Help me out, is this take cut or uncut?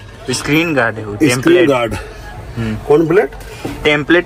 uncut